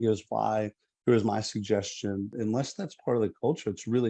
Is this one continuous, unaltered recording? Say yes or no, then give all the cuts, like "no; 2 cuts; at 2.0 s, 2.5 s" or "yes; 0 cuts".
no; 1 cut; at 2.3 s